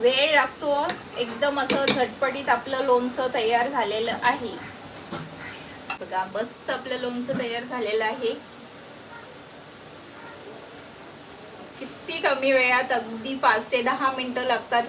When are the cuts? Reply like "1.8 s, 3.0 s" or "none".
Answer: 6.0 s

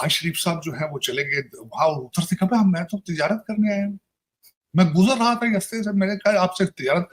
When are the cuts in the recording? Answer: none

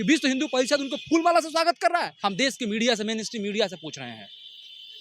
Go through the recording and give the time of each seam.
2.1 s

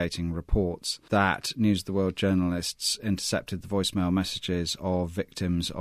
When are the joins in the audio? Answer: 0.9 s

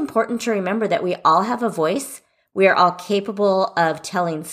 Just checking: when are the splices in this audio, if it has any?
none

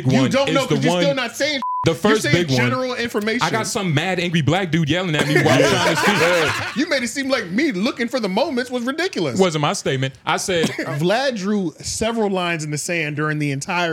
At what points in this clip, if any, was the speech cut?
6.6 s, 10.8 s

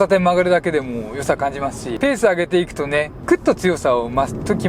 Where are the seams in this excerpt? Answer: 1.9 s, 3.1 s

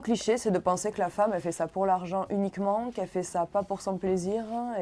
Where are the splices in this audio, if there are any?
none

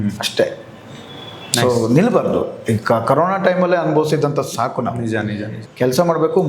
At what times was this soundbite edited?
5.6 s

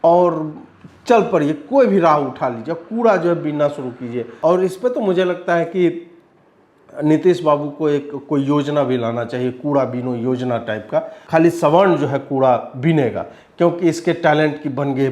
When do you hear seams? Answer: 4.3 s, 11.2 s

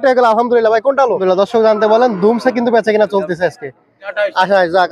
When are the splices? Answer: 1.2 s, 4.1 s

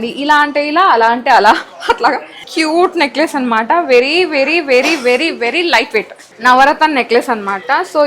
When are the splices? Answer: 2.5 s, 6.2 s

